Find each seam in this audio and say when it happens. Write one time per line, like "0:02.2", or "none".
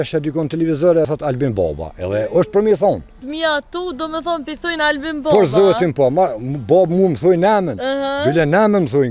0:01.1
0:03.2